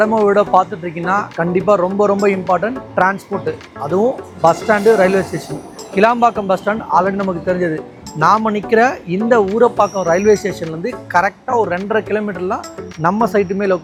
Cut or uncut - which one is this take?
uncut